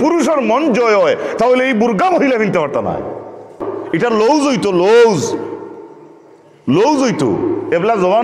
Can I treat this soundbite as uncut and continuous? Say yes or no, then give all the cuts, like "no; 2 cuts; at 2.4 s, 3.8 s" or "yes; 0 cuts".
no; 1 cut; at 3.7 s